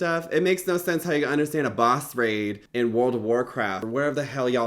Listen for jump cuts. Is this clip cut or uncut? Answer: cut